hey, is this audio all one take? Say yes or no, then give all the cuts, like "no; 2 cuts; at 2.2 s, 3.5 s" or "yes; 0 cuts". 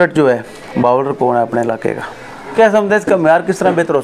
no; 1 cut; at 2.5 s